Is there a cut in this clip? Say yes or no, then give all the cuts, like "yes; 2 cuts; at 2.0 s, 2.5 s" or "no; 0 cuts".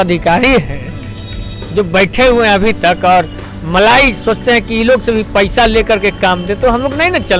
no; 0 cuts